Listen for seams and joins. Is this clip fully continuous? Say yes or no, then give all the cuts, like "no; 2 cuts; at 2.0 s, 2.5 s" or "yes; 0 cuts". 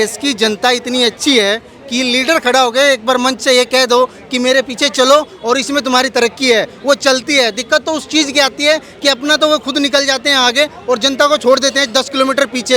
yes; 0 cuts